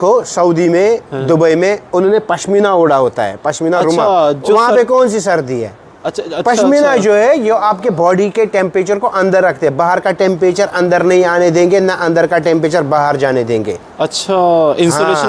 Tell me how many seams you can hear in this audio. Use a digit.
0